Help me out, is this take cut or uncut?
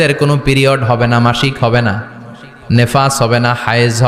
uncut